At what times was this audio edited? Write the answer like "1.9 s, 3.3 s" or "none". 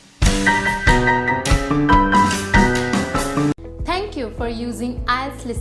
3.5 s